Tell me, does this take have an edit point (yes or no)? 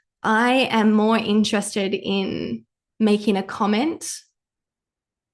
no